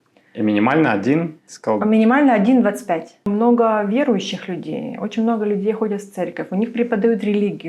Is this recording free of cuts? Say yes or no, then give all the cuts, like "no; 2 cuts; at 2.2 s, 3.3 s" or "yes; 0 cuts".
no; 1 cut; at 3.2 s